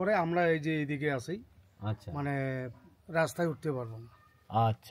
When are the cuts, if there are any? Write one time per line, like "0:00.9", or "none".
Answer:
none